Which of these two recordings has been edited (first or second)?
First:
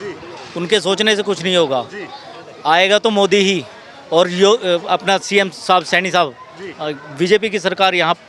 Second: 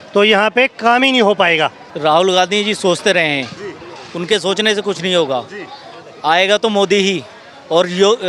second